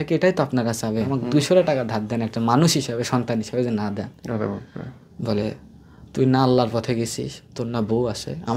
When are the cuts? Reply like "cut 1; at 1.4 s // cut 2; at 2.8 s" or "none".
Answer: cut 1; at 1.2 s